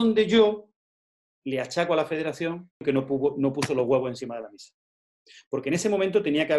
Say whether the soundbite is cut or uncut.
cut